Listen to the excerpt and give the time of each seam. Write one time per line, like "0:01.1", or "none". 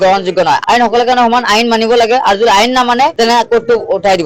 none